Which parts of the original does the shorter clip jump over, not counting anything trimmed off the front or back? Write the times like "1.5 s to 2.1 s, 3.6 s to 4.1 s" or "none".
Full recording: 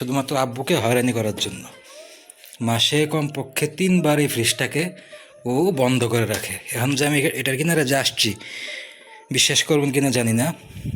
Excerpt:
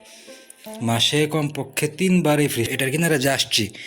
4.5 s to 7.4 s